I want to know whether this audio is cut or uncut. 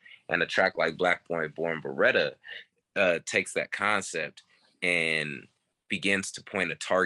uncut